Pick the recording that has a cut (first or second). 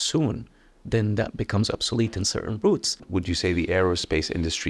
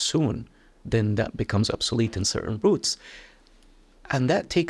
first